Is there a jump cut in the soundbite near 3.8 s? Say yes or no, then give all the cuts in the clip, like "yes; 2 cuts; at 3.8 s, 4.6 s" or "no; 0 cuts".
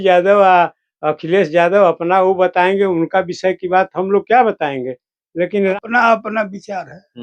no; 1 cut; at 5.7 s